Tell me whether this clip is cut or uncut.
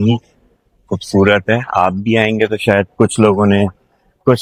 uncut